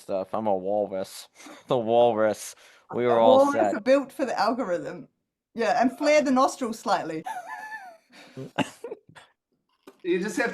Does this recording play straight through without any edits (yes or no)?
no